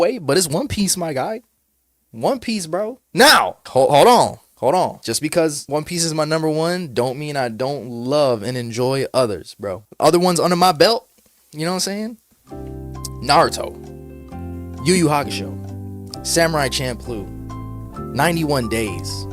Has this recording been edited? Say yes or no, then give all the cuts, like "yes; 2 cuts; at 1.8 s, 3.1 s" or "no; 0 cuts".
yes; 2 cuts; at 3.0 s, 3.6 s